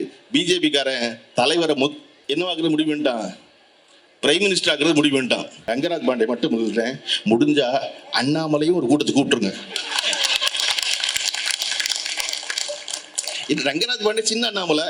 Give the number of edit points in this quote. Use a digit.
2